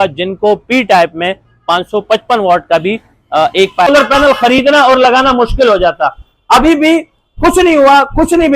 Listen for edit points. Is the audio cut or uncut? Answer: cut